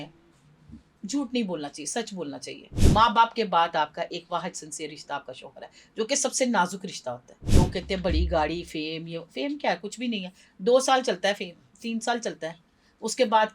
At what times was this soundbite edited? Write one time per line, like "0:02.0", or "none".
0:02.7
0:07.4